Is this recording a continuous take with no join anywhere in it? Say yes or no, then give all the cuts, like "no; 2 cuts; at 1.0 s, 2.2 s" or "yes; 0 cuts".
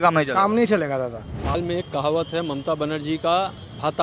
no; 1 cut; at 1.5 s